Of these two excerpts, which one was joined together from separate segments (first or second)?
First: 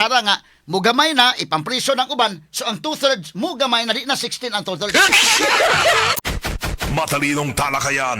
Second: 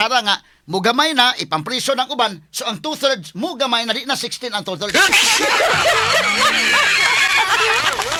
first